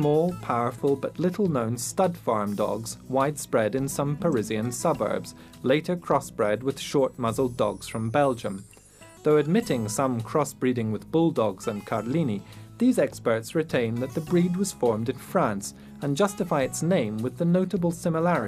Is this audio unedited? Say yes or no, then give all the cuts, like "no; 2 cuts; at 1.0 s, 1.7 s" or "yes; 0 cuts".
yes; 0 cuts